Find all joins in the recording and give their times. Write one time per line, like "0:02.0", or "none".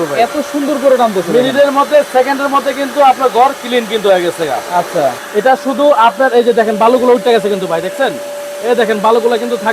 0:05.2